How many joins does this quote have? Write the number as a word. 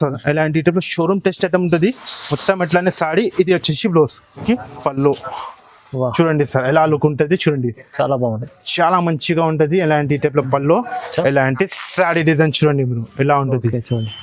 one